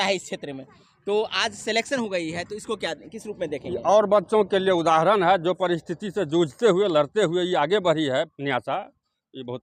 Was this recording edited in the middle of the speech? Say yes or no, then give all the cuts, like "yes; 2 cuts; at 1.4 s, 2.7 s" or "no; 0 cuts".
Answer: no; 0 cuts